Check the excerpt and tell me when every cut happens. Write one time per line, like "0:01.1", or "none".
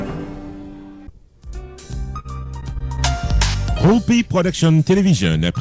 0:01.1